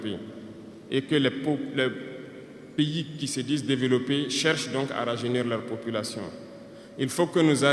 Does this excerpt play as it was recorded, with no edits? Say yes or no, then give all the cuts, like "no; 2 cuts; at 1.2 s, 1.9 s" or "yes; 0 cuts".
yes; 0 cuts